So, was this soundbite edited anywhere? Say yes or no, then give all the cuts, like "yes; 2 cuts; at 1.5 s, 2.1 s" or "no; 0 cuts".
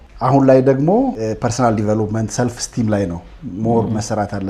yes; 1 cut; at 1.2 s